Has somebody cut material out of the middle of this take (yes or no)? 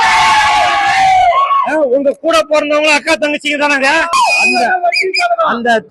yes